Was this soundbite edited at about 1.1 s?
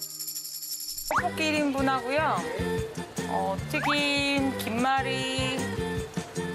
yes; 1 cut; at 1.1 s

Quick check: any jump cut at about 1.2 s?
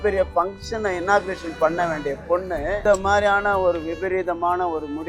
no; 1 cut; at 2.8 s

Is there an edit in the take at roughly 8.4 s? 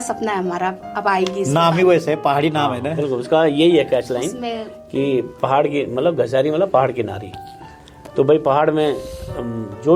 no; 0 cuts

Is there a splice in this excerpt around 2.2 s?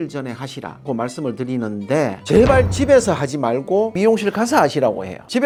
no; 0 cuts

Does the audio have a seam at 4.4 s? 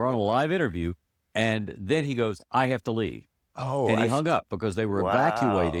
no; 0 cuts

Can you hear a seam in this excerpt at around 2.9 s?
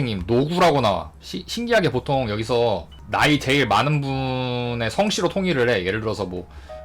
yes; 1 cut; at 2.9 s

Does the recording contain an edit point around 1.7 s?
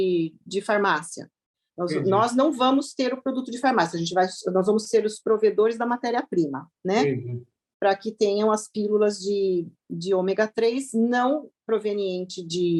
no; 0 cuts

